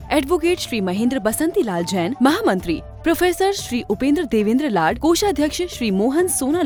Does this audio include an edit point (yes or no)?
no